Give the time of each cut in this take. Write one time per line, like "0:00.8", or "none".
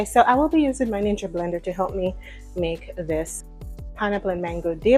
0:03.4